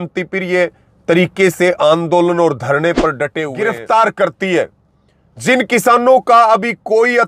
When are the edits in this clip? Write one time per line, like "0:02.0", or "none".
0:03.4